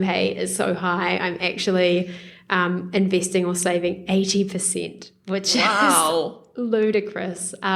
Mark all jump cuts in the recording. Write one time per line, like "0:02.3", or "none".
none